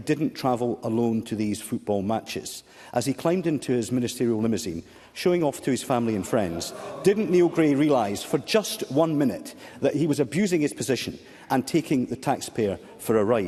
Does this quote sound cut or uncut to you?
uncut